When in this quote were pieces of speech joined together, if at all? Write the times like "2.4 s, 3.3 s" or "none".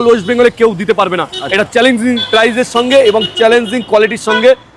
none